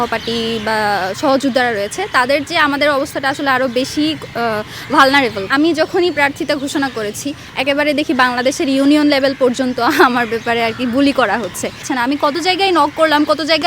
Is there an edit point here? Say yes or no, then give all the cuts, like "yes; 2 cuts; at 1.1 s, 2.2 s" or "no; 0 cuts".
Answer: yes; 2 cuts; at 5.5 s, 11.8 s